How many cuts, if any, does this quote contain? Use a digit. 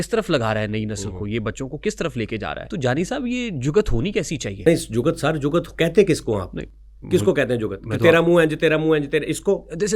2